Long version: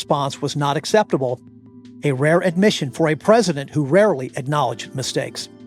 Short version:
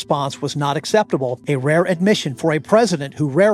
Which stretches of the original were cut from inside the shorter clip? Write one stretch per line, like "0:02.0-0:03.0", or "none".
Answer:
0:01.4-0:02.0